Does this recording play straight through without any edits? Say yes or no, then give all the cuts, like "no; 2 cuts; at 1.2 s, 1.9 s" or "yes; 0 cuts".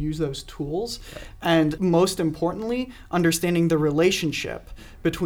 no; 1 cut; at 1.8 s